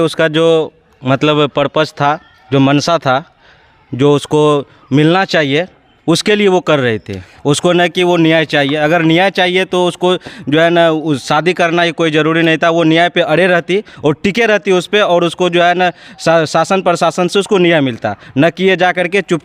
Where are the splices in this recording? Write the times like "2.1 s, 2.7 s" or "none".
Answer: none